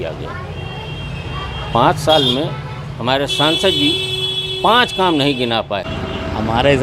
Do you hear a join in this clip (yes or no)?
yes